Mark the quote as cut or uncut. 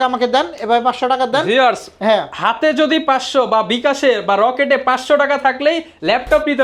uncut